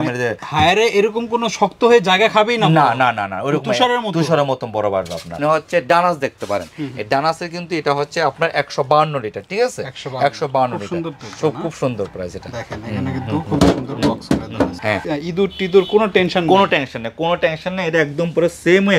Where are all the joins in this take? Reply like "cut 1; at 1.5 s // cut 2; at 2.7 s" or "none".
cut 1; at 5.4 s // cut 2; at 15.0 s